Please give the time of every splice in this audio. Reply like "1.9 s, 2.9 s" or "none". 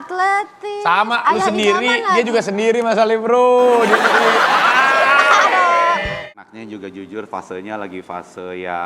6.2 s